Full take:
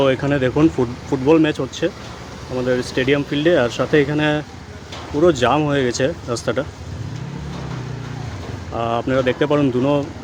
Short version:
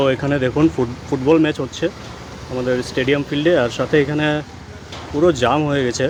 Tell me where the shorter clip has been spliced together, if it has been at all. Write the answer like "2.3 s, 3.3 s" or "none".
none